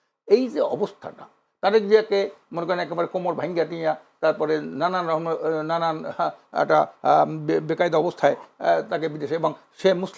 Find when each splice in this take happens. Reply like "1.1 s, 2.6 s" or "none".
none